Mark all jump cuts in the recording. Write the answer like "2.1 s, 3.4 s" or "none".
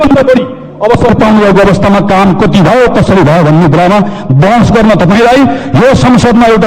none